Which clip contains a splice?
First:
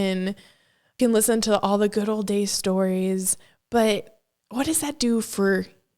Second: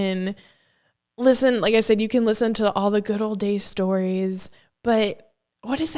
first; 1 cut; at 0.9 s

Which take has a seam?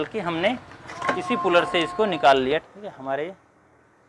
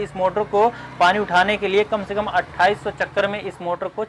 first; 1 cut; at 2.7 s

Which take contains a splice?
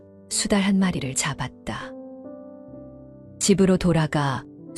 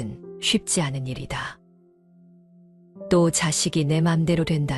first; 2 cuts; at 1.8 s, 3.0 s

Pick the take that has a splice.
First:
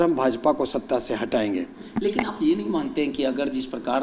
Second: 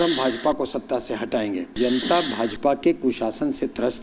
second; 1 cut; at 1.8 s

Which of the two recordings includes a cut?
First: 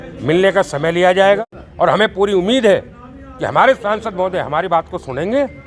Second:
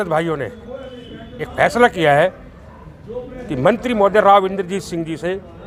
first; 1 cut; at 1.4 s

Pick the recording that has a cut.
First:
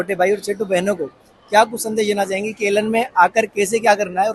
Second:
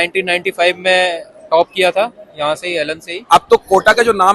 second; 1 cut; at 3.2 s

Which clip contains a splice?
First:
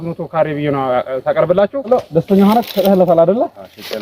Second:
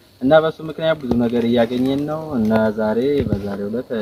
first; 1 cut; at 1.9 s

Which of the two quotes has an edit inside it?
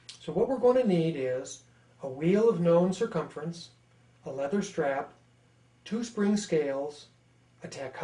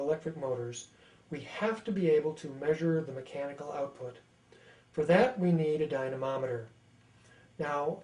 first; 1 cut; at 1.0 s

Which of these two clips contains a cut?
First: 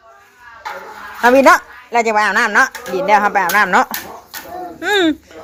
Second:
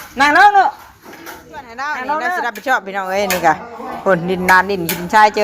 second; 1 cut; at 2.5 s

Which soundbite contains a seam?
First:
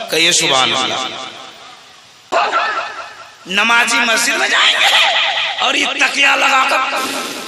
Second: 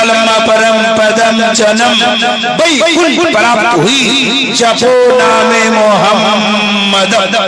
first; 1 cut; at 2.3 s

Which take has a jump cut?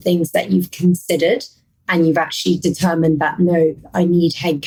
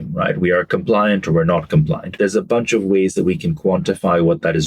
second; 1 cut; at 2.2 s

